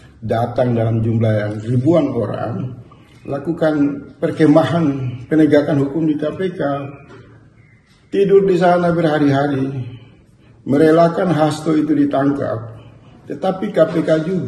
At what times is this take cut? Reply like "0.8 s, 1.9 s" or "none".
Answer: none